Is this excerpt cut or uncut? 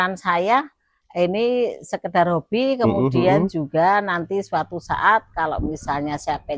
uncut